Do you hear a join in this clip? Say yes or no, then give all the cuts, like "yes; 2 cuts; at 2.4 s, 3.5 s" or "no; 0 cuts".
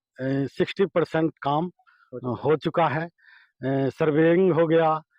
no; 0 cuts